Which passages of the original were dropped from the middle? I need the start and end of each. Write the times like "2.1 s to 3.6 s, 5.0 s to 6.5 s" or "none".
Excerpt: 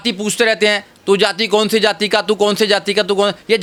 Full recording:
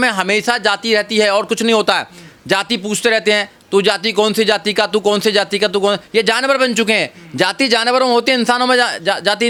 none